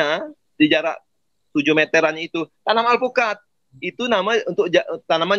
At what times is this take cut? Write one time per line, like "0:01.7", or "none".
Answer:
none